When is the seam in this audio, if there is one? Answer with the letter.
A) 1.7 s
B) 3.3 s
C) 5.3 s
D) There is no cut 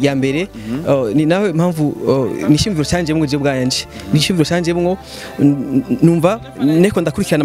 D